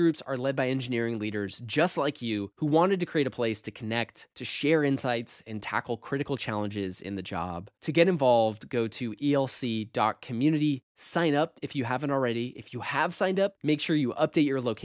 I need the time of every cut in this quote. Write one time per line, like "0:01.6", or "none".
none